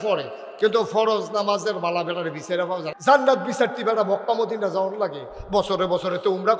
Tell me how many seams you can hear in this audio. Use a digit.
1